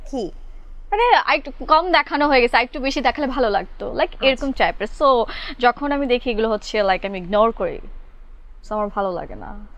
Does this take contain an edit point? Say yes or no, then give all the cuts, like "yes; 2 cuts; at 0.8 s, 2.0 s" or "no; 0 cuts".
no; 0 cuts